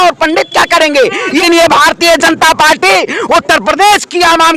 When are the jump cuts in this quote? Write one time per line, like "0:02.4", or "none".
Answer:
0:01.4